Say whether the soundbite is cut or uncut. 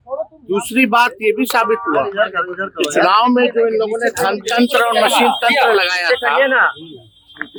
uncut